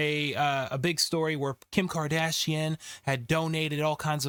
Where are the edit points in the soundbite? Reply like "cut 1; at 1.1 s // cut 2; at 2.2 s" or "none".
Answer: none